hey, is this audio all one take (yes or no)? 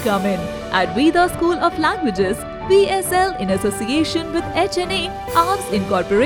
yes